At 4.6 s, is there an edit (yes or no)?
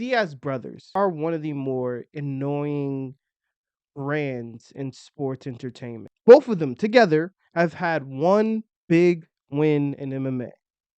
no